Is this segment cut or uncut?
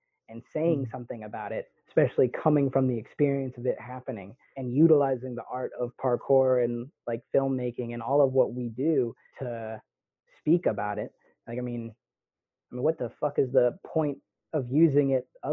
cut